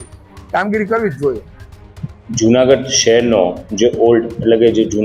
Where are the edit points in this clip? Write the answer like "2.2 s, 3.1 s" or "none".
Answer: none